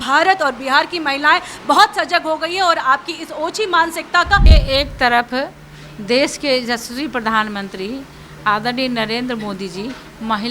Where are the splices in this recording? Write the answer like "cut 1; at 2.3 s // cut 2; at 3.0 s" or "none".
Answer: cut 1; at 4.5 s